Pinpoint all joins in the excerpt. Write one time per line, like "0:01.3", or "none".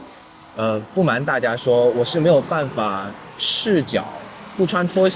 none